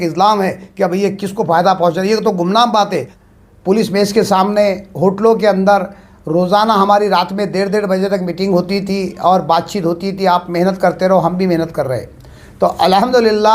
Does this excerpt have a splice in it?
yes; 1 cut; at 3.1 s

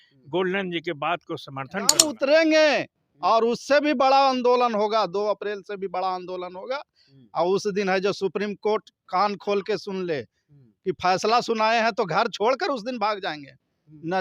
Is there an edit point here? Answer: yes; 1 cut; at 2.0 s

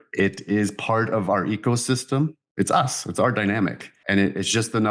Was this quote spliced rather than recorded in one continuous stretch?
yes; 1 cut; at 2.4 s

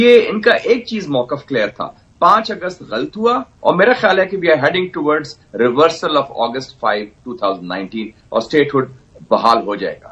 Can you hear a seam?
yes; 1 cut; at 3.5 s

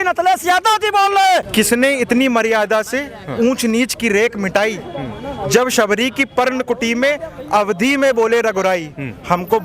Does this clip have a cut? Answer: yes; 1 cut; at 1.5 s

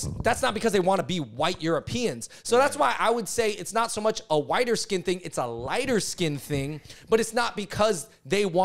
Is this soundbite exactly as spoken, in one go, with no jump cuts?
yes; 0 cuts

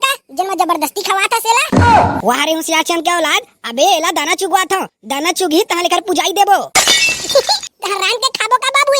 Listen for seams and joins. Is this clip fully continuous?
yes; 0 cuts

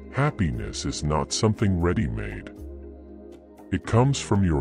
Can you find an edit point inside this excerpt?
yes; 2 cuts; at 2.4 s, 3.7 s

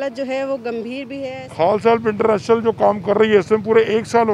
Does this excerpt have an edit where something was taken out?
yes; 1 cut; at 1.4 s

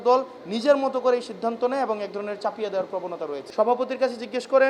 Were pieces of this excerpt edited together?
yes; 1 cut; at 3.4 s

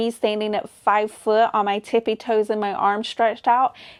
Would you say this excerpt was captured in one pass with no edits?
yes; 0 cuts

